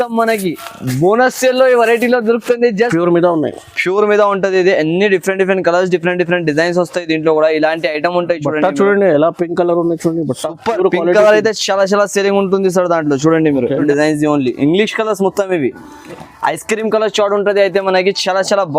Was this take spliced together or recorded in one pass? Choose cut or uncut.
cut